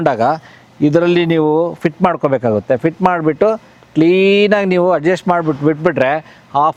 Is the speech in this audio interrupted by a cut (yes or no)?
no